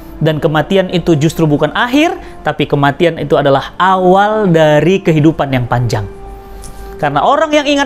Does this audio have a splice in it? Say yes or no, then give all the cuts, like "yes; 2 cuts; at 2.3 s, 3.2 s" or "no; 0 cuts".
no; 0 cuts